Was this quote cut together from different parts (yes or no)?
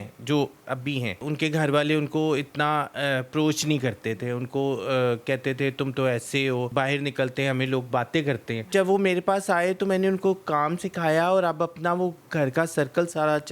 yes